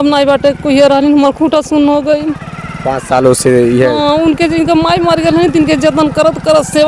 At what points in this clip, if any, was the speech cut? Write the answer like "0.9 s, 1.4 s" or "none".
none